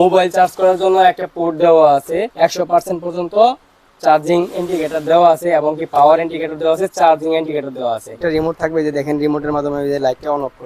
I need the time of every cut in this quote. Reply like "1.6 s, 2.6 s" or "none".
2.3 s, 8.2 s